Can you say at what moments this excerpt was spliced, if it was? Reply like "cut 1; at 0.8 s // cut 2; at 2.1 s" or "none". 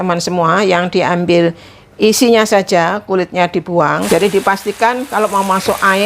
cut 1; at 4.0 s